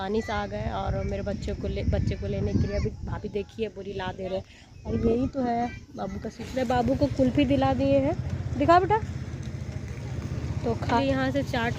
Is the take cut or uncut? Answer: cut